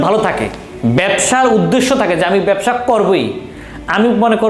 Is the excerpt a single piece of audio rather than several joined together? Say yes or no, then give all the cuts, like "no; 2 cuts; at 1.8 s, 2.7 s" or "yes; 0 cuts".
yes; 0 cuts